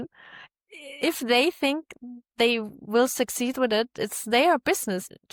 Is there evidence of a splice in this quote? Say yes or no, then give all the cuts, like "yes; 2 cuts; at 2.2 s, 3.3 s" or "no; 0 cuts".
no; 0 cuts